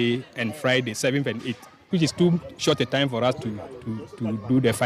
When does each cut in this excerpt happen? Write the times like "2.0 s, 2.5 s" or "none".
1.9 s